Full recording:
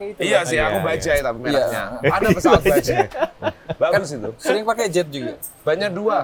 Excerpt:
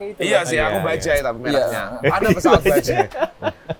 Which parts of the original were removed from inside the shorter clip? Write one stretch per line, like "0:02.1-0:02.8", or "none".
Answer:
none